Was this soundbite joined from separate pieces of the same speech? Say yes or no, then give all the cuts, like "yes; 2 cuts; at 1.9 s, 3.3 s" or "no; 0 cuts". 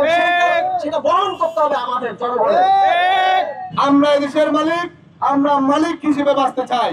yes; 1 cut; at 3.8 s